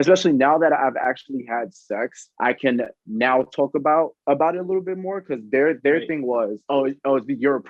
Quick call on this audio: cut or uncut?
cut